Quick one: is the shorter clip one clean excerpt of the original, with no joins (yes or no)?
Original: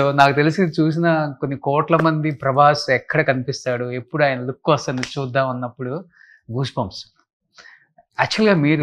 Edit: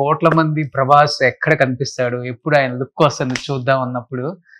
yes